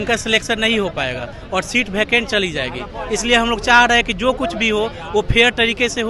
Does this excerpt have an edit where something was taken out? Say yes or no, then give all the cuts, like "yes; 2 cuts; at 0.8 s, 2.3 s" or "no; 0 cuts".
no; 0 cuts